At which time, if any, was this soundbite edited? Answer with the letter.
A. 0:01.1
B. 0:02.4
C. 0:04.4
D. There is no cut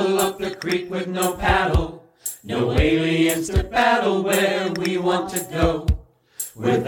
D